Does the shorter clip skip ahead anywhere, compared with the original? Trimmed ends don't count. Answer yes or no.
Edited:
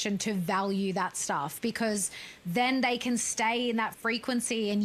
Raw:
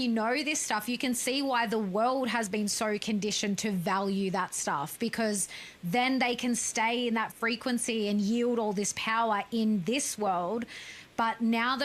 no